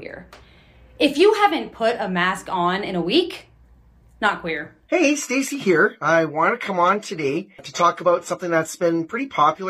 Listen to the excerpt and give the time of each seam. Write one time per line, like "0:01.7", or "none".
0:04.8